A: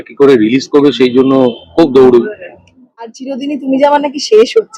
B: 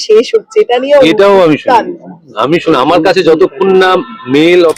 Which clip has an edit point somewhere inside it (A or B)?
A